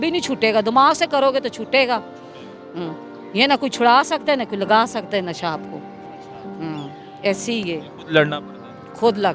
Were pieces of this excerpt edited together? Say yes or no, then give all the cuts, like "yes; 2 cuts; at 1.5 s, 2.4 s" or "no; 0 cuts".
no; 0 cuts